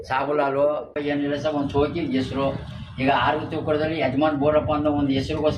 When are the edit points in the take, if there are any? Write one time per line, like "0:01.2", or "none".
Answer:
0:01.0